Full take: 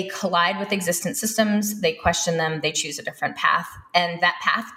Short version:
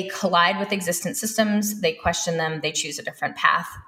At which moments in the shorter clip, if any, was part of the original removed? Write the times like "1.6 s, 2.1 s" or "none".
none